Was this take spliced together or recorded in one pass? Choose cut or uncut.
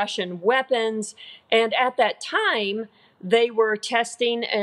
uncut